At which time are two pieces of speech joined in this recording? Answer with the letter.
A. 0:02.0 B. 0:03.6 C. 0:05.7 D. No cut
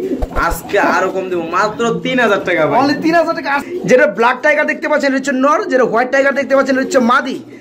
B